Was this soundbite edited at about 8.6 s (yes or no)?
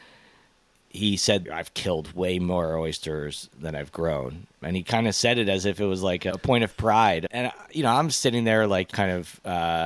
no